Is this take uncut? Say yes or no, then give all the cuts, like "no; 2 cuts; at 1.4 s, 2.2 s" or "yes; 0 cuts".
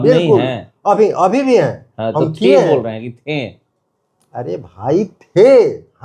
yes; 0 cuts